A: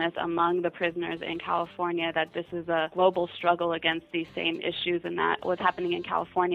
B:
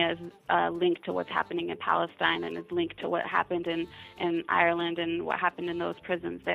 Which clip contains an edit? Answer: A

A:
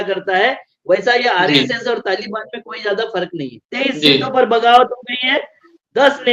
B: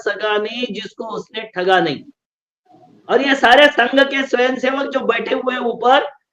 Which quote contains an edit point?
A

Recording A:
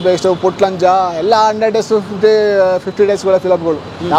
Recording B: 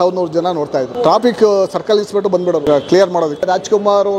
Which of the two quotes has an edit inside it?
B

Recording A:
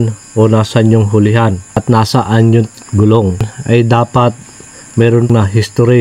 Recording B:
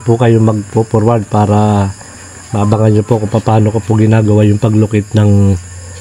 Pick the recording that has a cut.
A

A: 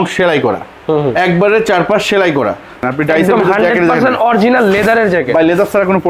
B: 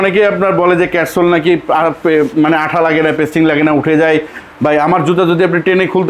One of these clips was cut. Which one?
A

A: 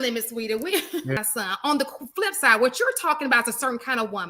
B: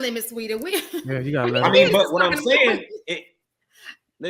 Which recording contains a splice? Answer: A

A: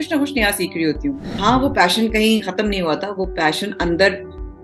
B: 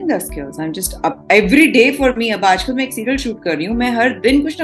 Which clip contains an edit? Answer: A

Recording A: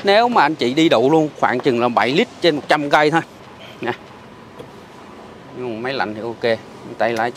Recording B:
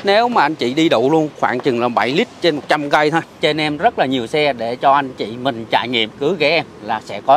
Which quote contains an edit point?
B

